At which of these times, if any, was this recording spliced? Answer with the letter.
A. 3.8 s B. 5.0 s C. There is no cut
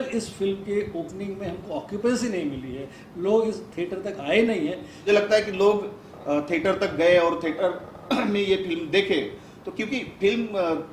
B